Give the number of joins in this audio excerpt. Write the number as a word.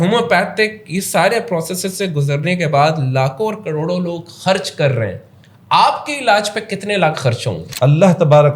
one